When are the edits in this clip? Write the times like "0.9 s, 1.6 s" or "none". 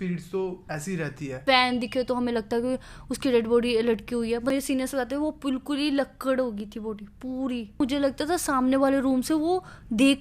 1.4 s, 4.5 s, 7.8 s